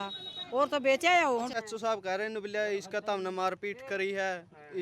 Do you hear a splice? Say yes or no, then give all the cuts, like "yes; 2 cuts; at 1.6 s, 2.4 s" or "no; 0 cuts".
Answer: yes; 1 cut; at 1.5 s